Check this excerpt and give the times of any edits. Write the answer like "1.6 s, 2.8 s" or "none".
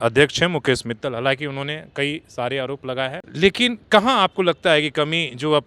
3.3 s